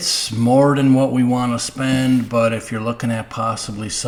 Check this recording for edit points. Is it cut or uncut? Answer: uncut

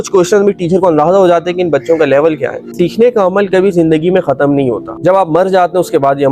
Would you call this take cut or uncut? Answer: cut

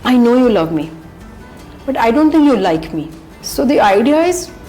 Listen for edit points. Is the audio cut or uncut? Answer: cut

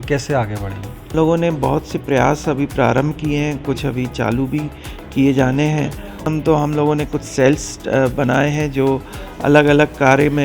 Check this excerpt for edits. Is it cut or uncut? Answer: cut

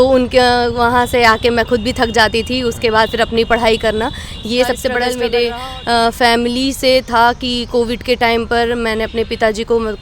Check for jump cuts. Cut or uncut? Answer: cut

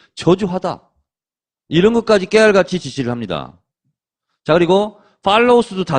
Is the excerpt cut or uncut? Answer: uncut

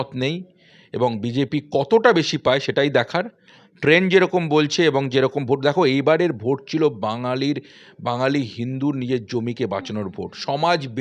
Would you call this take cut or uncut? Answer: uncut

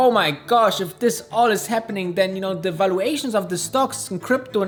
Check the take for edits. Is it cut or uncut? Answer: uncut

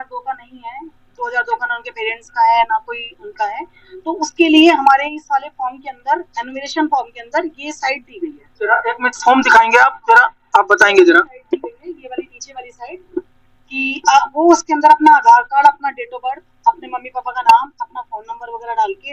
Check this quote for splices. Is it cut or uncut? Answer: uncut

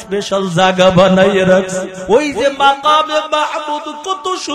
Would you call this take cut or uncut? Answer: cut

